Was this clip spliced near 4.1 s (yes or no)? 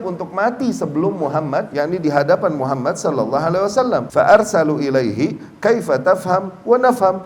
yes